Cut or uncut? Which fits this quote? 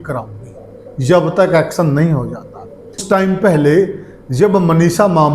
cut